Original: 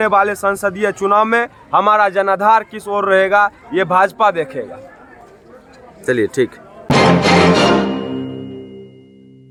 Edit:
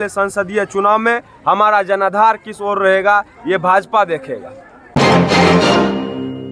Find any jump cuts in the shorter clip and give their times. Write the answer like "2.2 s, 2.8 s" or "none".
4.7 s